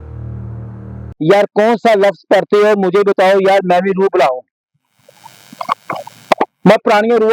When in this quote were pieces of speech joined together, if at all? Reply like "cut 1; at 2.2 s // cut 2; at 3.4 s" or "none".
cut 1; at 1.1 s